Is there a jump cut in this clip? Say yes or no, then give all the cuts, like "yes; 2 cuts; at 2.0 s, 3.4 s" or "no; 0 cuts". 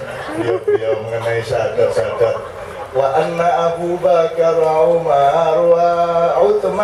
no; 0 cuts